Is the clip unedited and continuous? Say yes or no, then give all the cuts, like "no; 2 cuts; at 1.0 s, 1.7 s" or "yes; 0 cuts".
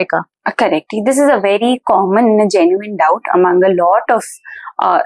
yes; 0 cuts